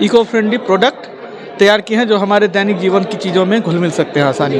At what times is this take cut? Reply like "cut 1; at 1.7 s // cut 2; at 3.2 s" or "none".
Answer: none